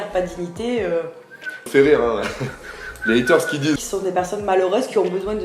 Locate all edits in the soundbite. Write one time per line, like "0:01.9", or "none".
0:01.6
0:03.8